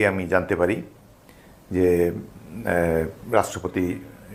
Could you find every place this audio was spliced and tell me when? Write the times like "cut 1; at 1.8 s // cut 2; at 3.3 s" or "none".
none